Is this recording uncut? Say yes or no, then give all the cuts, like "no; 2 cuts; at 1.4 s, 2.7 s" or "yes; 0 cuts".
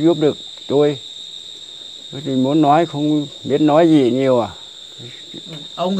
yes; 0 cuts